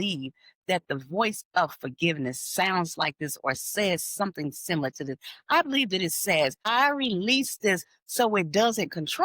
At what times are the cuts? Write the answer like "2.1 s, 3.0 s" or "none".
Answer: 6.6 s